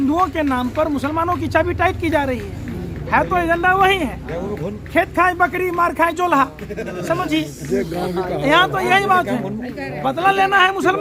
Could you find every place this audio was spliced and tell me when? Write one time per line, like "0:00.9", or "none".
none